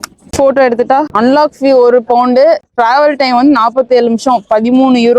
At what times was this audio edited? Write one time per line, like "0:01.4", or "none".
0:01.1
0:02.7